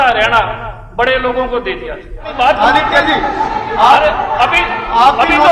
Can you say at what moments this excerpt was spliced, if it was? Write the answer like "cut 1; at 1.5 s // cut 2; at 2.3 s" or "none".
cut 1; at 2.3 s